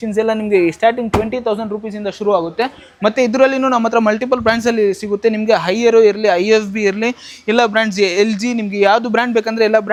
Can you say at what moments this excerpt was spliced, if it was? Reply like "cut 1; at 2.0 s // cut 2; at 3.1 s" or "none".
none